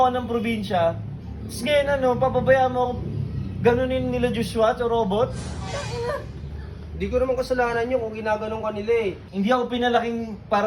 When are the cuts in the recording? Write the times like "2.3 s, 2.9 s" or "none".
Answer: none